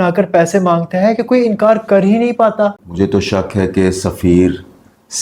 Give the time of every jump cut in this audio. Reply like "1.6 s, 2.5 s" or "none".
2.8 s